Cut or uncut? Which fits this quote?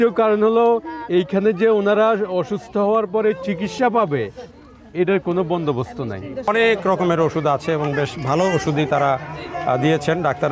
cut